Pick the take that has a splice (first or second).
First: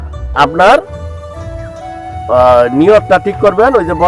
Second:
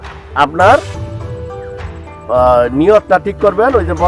first